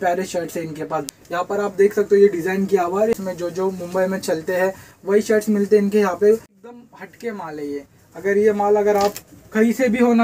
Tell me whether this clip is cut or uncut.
cut